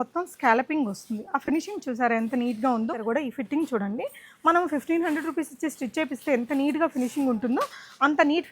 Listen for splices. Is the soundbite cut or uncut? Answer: cut